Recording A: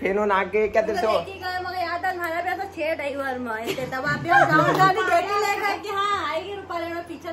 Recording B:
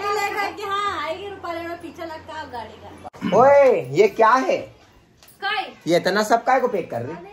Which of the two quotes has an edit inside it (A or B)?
B